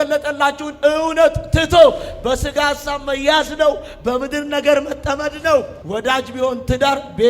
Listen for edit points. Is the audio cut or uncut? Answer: cut